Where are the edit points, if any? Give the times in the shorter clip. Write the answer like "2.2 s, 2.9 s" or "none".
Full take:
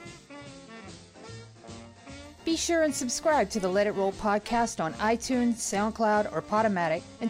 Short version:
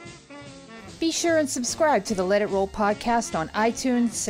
1.0 s